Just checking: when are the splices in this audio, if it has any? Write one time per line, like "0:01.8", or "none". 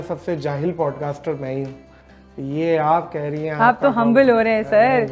none